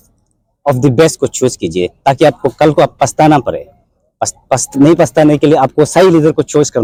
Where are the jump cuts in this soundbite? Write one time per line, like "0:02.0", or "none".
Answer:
none